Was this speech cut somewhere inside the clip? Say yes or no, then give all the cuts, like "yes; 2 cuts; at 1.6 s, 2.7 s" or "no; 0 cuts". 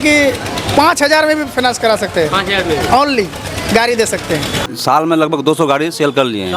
yes; 1 cut; at 4.6 s